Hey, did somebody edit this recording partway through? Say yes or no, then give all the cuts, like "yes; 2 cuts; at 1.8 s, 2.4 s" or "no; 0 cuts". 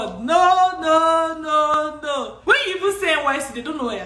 yes; 1 cut; at 2.3 s